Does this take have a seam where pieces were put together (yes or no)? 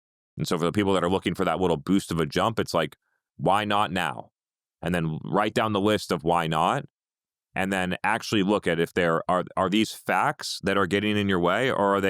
yes